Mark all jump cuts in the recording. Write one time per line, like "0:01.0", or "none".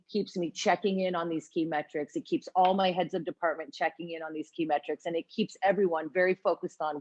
none